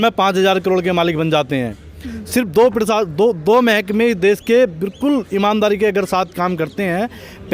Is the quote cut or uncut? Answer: uncut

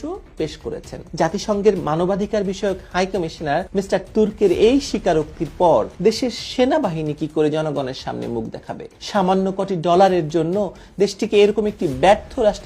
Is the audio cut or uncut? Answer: cut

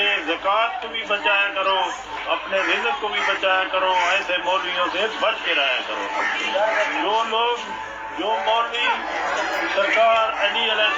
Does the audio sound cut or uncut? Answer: uncut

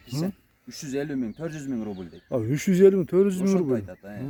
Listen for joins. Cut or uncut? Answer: uncut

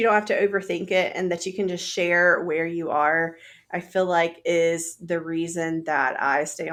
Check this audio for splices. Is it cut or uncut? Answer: uncut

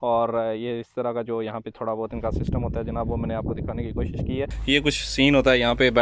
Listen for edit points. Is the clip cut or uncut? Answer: cut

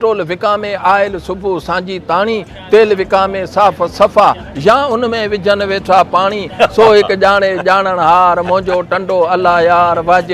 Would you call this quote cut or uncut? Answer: uncut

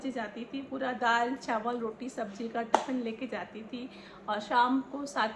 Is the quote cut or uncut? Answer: uncut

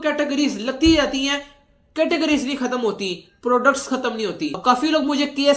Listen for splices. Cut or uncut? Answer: cut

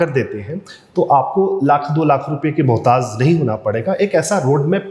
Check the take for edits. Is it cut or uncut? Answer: uncut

